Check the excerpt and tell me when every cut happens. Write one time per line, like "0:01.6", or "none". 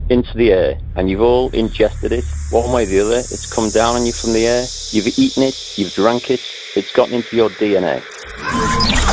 0:08.2